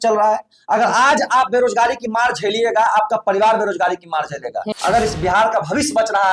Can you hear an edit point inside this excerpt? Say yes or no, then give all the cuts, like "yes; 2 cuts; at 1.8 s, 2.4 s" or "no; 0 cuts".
yes; 1 cut; at 4.6 s